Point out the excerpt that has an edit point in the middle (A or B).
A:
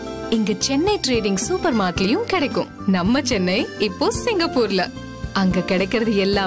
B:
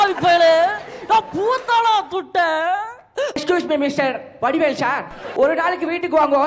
B